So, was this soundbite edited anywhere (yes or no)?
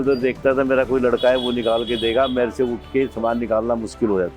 no